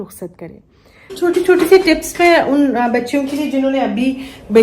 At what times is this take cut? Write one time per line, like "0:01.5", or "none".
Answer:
0:01.1